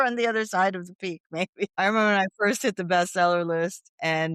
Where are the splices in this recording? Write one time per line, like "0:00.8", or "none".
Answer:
0:01.8